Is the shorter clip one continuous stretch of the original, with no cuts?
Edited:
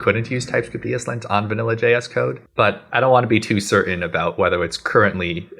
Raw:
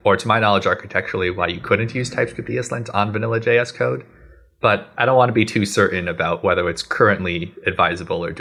no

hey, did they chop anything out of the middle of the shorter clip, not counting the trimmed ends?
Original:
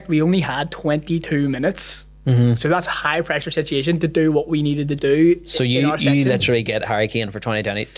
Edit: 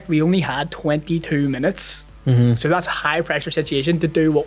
no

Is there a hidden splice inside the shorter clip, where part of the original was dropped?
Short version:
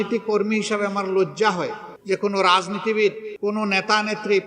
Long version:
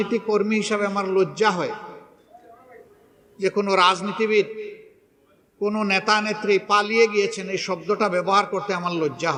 yes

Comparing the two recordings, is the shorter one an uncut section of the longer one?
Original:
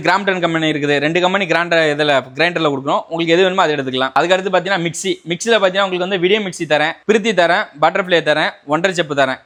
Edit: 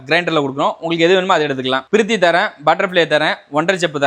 no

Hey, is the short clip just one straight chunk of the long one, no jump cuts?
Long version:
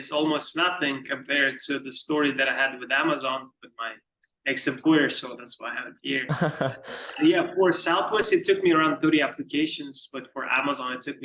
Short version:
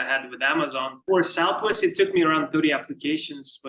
no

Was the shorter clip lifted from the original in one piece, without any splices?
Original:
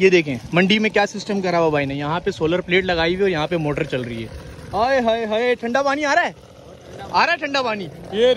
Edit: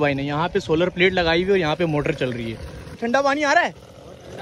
no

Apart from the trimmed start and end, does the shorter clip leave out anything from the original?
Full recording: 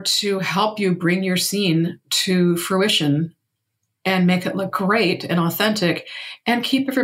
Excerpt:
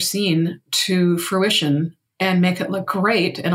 yes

